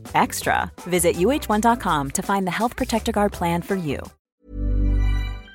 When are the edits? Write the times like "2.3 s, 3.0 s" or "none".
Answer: 4.2 s